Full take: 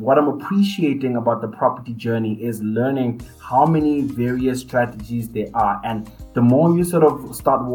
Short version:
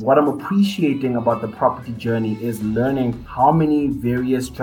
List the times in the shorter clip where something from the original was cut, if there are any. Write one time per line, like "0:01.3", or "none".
0:03.2